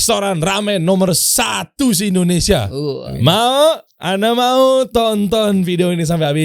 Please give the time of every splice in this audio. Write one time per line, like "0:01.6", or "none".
0:03.1